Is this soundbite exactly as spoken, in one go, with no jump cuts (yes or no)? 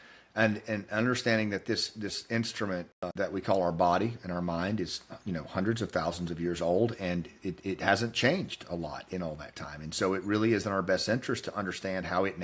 no